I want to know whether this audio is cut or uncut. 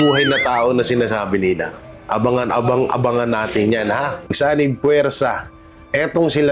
cut